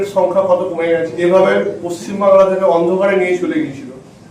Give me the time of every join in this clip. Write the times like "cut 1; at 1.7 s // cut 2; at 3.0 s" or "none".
cut 1; at 1.1 s